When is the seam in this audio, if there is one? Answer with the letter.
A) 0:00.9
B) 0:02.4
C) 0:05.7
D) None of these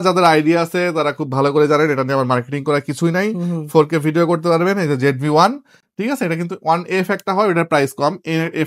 D